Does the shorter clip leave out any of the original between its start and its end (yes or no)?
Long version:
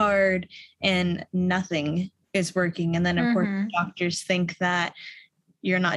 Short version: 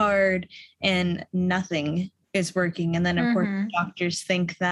no